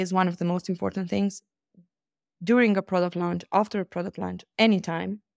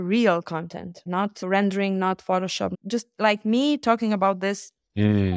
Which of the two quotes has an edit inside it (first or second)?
second